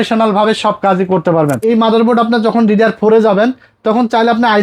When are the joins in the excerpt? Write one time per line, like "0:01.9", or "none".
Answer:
0:01.6

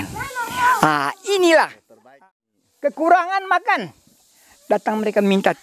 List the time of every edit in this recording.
0:02.1

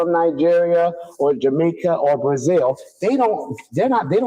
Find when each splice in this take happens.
none

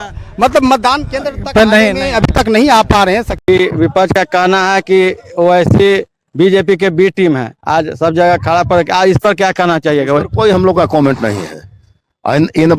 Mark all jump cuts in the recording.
0:03.5

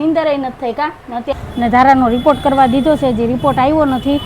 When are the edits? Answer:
0:01.3

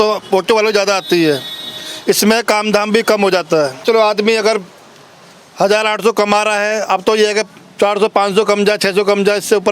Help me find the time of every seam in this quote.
0:03.8

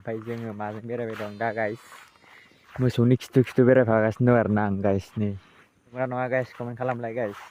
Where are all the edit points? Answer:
0:05.9

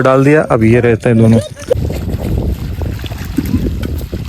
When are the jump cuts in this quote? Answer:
0:01.7

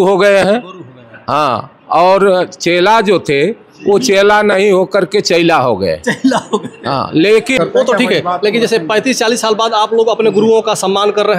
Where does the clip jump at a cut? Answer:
0:07.5

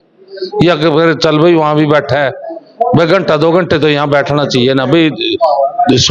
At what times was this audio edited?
none

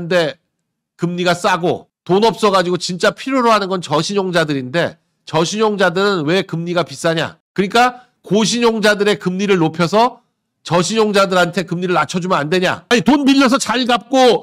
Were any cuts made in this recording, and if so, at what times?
0:02.0
0:12.9

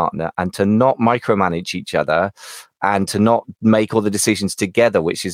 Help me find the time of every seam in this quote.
none

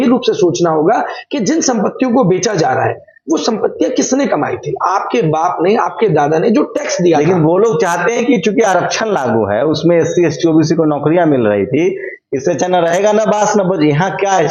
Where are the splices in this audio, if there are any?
none

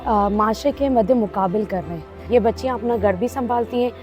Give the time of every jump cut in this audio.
0:02.3

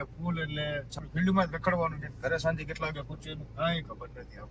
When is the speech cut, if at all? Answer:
0:01.0

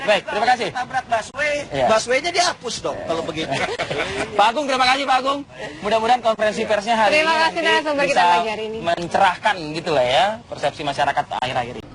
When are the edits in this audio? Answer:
none

